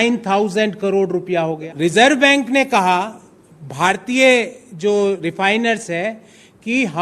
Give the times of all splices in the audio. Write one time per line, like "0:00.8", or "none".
0:01.7